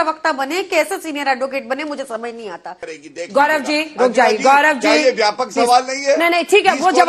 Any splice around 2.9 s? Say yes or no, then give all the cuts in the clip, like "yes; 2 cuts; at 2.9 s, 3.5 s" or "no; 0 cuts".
yes; 1 cut; at 2.9 s